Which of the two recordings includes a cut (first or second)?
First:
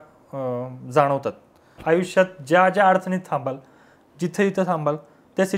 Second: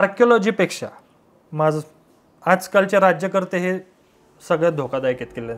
first